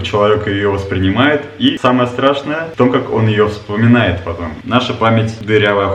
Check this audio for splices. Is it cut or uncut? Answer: cut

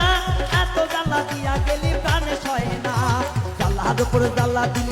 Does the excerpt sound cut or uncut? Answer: uncut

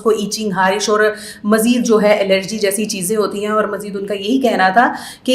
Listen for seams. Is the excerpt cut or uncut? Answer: uncut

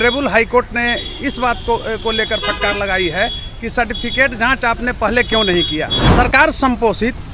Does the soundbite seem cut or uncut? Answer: cut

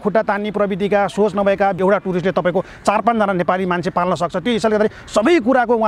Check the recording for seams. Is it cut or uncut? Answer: cut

